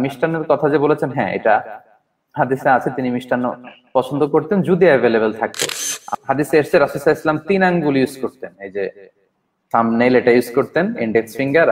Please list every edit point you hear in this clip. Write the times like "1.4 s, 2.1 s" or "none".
6.1 s